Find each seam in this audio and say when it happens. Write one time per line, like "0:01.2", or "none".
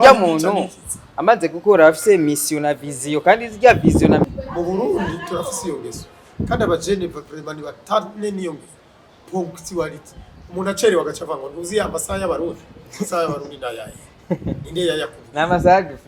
0:04.3